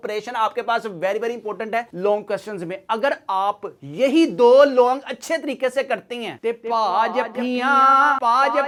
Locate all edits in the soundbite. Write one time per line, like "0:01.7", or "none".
none